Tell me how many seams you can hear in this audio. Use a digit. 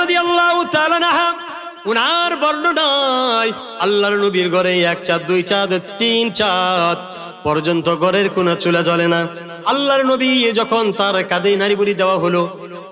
1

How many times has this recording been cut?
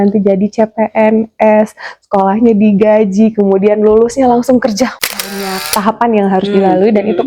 1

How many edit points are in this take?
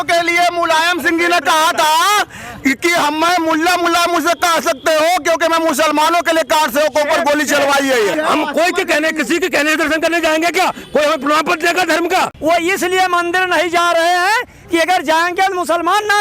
2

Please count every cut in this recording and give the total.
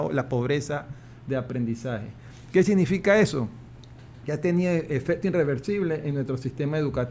0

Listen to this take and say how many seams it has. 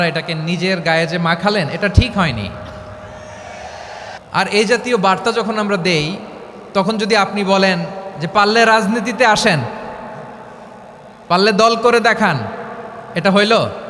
1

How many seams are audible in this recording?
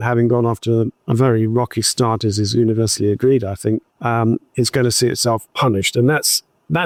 0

